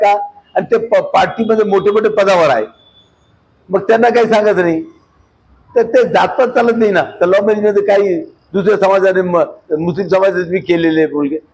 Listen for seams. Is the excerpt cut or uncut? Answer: uncut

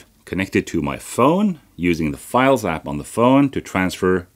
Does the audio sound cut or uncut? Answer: uncut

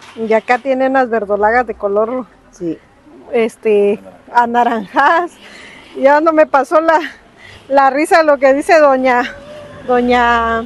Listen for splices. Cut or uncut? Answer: uncut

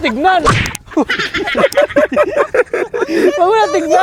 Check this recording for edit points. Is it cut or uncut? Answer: uncut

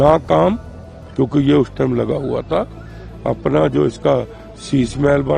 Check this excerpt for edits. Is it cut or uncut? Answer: uncut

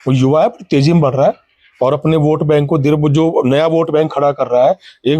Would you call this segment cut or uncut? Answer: uncut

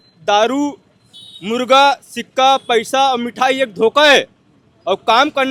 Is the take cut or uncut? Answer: uncut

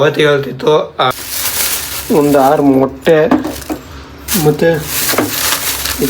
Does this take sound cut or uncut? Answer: cut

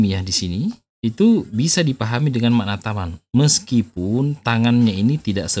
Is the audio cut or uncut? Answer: uncut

